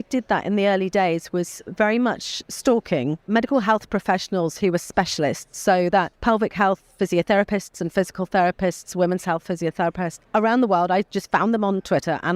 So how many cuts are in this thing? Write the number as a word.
three